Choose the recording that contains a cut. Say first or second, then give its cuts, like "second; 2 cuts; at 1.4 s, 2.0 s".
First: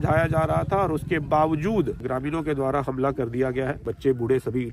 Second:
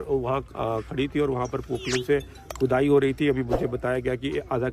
first; 2 cuts; at 2.0 s, 3.8 s